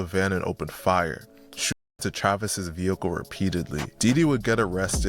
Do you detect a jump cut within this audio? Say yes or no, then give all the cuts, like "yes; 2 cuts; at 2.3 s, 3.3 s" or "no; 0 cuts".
yes; 1 cut; at 3.9 s